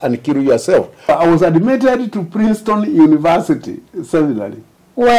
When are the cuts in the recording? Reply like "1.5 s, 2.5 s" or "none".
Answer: 1.1 s